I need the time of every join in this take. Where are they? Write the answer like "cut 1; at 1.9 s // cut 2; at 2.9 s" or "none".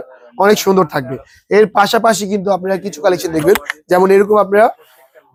none